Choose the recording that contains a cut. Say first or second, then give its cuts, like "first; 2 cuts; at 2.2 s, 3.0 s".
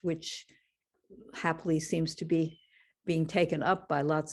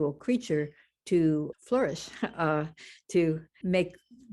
second; 2 cuts; at 1.5 s, 3.5 s